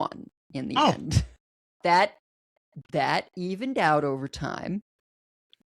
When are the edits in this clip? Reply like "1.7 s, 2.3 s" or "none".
1.7 s